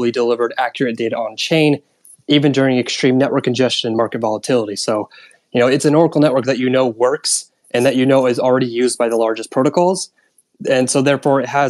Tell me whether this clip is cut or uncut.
uncut